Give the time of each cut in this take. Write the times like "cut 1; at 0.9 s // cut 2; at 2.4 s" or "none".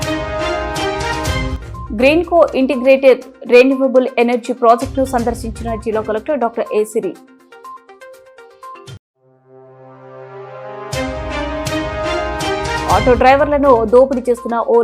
cut 1; at 1.1 s